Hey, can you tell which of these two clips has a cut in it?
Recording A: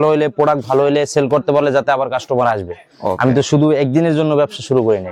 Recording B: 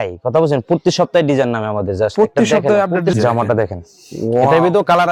B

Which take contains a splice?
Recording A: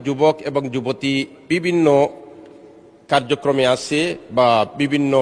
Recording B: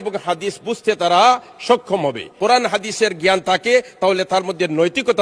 B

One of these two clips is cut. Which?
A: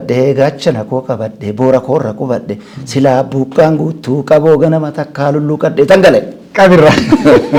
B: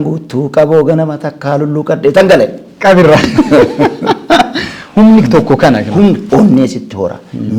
B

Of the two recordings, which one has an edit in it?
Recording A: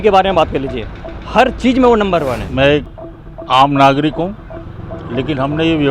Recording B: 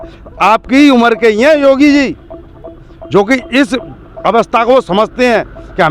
A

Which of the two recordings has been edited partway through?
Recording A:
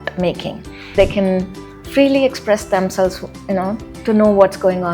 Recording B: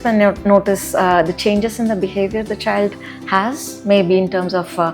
A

